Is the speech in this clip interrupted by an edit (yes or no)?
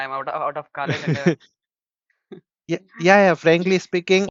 no